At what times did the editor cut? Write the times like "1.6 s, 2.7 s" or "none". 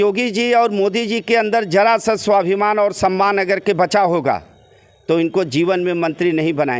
none